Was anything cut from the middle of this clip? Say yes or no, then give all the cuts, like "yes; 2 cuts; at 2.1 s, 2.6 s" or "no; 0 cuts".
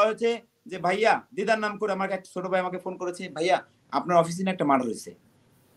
no; 0 cuts